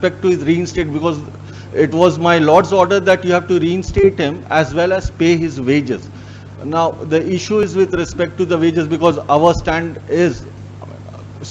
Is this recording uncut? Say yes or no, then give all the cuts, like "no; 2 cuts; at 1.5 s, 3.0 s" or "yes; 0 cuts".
yes; 0 cuts